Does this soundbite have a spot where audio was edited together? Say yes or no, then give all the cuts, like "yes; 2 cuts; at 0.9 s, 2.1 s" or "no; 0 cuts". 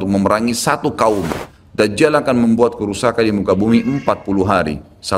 yes; 1 cut; at 1.5 s